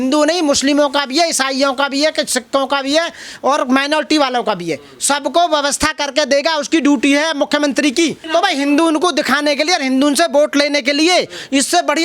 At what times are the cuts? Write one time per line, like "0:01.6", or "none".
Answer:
0:08.2